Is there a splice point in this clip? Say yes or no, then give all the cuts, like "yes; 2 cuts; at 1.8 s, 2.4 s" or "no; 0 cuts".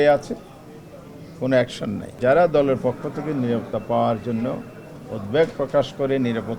yes; 1 cut; at 2.1 s